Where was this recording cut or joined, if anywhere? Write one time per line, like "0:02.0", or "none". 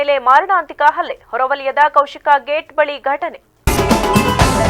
0:03.5

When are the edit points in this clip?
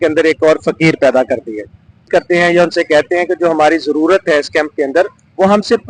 0:02.1

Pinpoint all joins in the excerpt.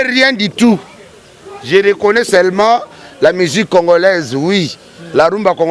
none

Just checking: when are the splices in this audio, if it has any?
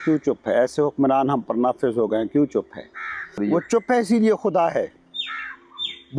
0:03.4

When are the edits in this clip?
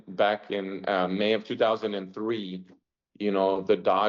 none

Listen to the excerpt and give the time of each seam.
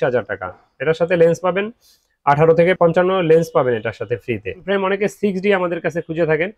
0:02.8
0:04.5

